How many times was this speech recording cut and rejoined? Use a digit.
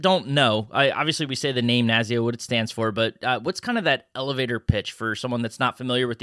0